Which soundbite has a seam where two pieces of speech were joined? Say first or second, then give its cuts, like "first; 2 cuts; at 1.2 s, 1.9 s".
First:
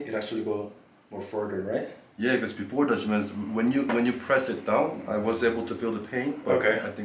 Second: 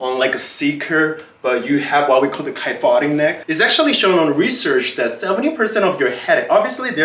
second; 1 cut; at 3.4 s